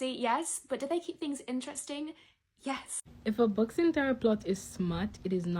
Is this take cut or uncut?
cut